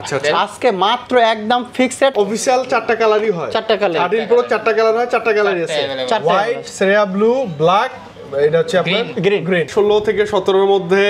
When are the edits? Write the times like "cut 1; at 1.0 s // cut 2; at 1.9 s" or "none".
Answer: cut 1; at 2.1 s // cut 2; at 9.7 s